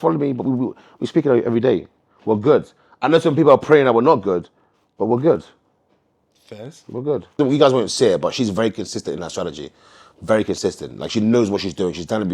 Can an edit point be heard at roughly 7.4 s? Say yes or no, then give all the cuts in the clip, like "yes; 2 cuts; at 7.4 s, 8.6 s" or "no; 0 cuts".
yes; 1 cut; at 7.4 s